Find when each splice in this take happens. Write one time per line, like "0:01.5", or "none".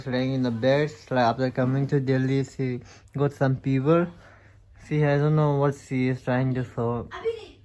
none